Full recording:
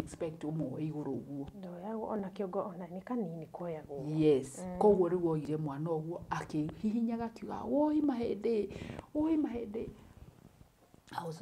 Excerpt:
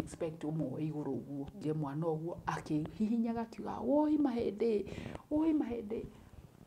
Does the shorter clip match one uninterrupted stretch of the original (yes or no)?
no